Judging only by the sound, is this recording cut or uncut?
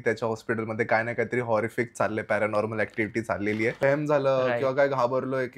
cut